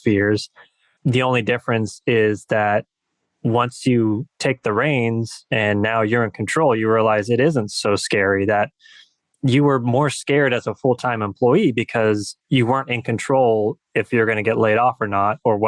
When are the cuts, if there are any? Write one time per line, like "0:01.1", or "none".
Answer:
0:12.4